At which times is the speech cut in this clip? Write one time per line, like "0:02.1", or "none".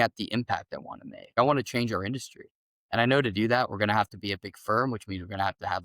0:01.2